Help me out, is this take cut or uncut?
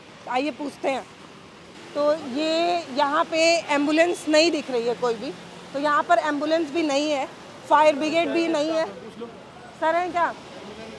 uncut